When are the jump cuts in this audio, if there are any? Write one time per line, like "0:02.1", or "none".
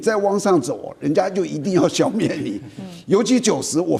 none